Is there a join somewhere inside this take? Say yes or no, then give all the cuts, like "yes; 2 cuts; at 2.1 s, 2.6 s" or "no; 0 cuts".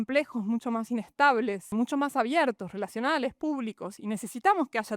yes; 1 cut; at 1.7 s